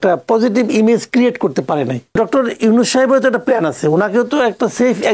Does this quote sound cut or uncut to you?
cut